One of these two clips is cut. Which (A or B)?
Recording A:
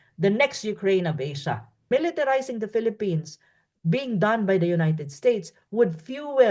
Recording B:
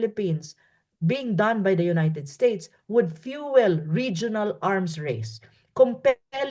A